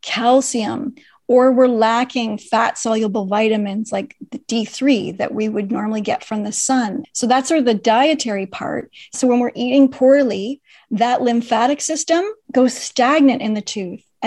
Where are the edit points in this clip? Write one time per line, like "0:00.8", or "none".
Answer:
0:07.0
0:09.2
0:12.4